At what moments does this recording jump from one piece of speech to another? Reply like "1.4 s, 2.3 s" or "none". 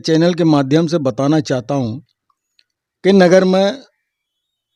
none

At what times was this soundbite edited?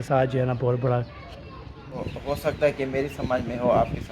2.1 s

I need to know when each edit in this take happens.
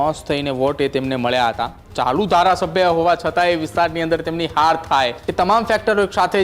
1.8 s, 5.2 s

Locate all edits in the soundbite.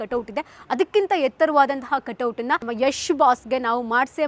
2.7 s

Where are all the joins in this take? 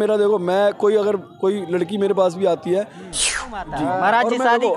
3.4 s

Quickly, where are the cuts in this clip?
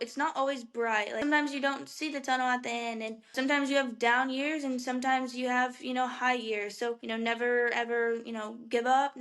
1.2 s, 3.4 s, 7.0 s

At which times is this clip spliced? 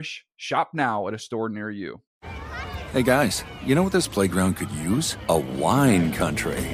2.0 s

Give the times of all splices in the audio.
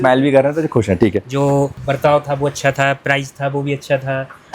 1.2 s

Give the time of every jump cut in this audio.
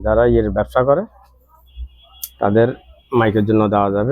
none

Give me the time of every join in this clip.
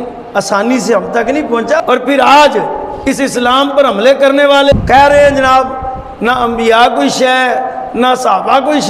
1.8 s, 4.7 s

